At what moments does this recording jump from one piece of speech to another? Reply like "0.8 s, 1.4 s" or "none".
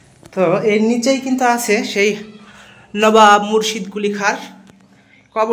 none